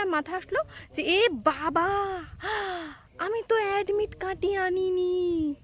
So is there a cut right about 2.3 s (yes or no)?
yes